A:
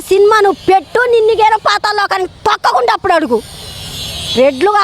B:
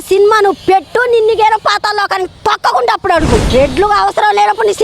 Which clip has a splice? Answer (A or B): B